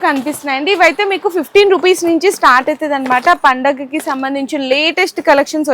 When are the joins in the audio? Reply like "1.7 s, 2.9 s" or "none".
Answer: none